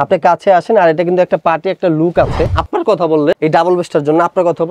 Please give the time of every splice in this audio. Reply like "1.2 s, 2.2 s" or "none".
2.6 s